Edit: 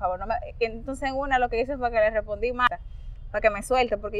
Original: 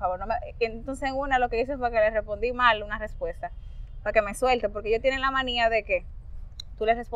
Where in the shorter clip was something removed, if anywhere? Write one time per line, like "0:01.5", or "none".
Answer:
0:02.7